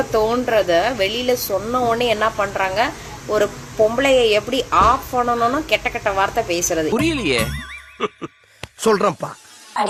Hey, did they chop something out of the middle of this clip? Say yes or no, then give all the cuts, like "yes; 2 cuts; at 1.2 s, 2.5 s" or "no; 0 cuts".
no; 0 cuts